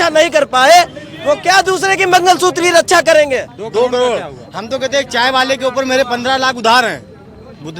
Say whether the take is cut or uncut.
cut